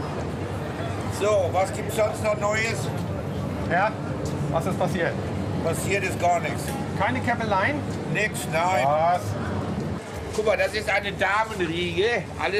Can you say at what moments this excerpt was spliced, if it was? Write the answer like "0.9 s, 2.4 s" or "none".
6.6 s